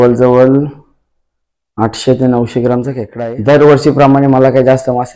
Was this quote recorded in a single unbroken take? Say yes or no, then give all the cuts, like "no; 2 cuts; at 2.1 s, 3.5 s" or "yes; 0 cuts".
no; 1 cut; at 3.0 s